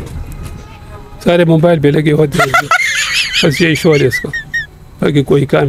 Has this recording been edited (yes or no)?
no